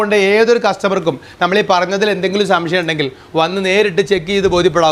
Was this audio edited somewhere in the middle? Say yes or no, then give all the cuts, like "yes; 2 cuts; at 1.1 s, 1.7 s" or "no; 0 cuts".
no; 0 cuts